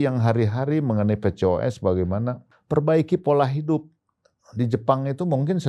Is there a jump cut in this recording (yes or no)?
yes